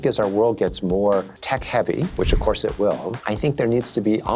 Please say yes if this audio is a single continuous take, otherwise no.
no